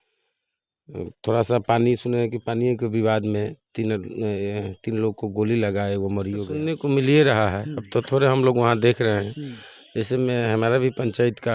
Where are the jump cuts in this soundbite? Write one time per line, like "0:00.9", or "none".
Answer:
0:06.6